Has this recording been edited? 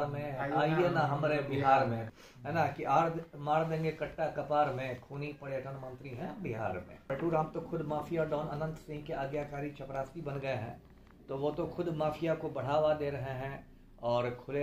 yes; 2 cuts; at 2.1 s, 7.1 s

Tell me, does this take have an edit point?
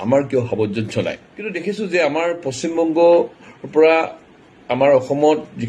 yes; 1 cut; at 1.7 s

